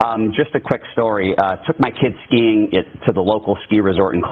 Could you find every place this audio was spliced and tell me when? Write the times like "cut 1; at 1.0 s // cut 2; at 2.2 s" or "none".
cut 1; at 1.3 s